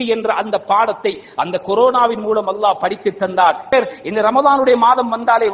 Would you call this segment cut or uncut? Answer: cut